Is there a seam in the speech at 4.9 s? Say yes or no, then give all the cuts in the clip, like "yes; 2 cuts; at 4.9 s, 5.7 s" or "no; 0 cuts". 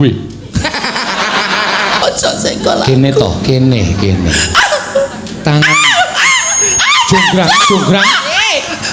no; 1 cut; at 2.0 s